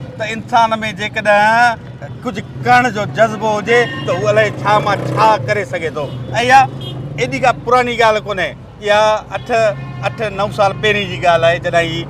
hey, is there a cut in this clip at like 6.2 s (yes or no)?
no